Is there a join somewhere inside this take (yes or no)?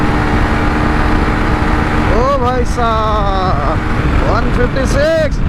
no